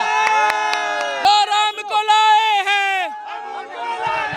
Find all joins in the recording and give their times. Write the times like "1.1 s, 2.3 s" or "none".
1.2 s